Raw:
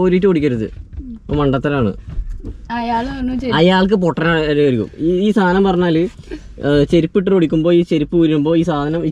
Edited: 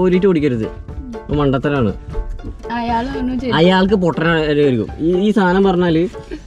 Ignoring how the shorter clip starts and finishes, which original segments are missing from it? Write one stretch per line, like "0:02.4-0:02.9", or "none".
none

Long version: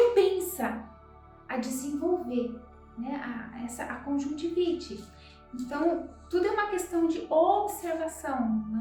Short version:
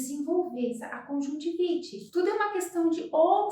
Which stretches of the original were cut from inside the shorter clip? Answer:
0:02.7-0:03.9
0:05.0-0:06.2

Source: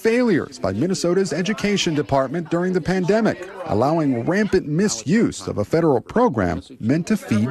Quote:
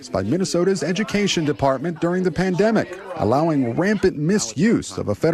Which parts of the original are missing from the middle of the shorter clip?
none

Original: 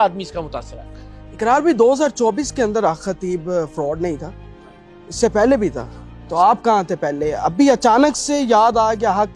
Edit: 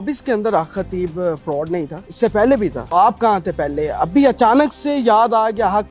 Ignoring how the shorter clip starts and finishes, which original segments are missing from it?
0:04.3-0:05.0
0:05.8-0:06.2

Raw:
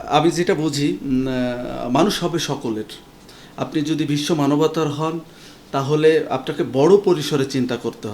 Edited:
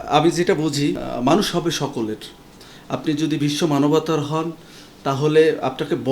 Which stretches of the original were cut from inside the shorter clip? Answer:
0:01.0-0:01.7

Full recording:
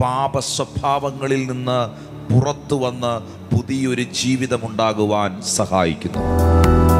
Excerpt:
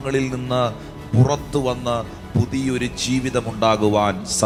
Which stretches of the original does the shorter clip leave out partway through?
none

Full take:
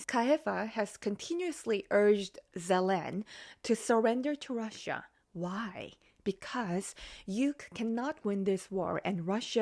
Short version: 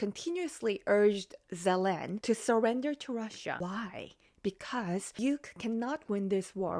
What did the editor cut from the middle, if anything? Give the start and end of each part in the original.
0:03.1-0:03.5
0:05.0-0:05.4
0:06.9-0:07.3

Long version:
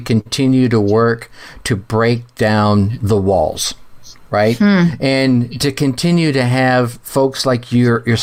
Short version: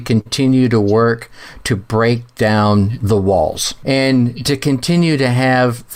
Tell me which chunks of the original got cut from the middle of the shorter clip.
0:03.8-0:05.0

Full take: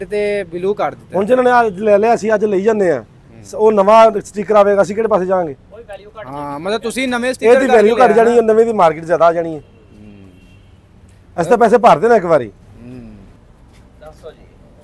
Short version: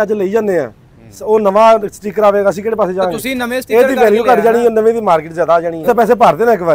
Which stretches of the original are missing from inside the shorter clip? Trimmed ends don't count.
0:05.5-0:06.9
0:09.5-0:11.4

